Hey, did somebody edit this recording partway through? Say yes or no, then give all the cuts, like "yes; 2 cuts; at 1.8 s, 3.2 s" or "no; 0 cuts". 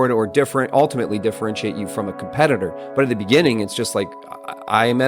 no; 0 cuts